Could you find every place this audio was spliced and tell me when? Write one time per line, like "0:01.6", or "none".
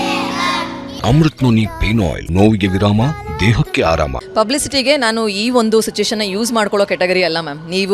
0:00.9
0:02.2
0:04.2